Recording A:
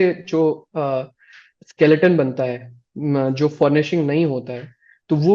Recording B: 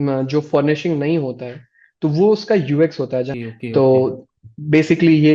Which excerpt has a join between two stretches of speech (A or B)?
B